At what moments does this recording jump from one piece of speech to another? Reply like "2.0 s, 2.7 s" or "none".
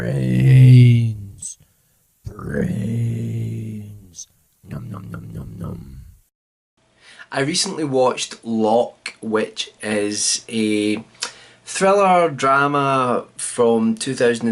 none